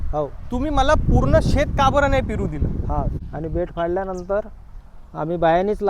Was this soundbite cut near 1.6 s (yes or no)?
no